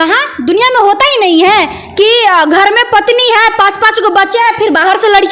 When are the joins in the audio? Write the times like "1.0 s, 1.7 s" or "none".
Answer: none